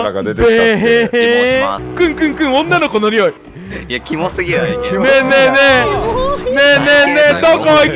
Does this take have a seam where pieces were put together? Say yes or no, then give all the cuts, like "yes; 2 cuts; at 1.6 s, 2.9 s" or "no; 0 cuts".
yes; 1 cut; at 1.8 s